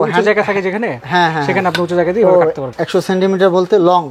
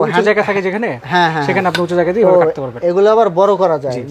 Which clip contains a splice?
first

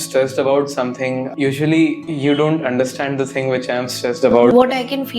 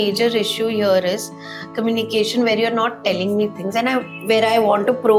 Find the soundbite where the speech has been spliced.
first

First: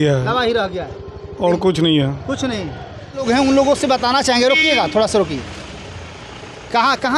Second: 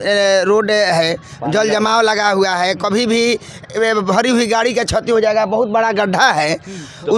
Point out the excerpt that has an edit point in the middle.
first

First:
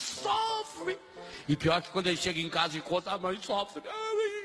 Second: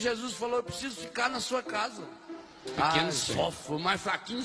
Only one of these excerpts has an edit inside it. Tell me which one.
second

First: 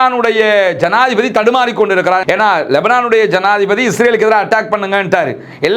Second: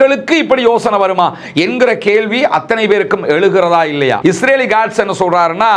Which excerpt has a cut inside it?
second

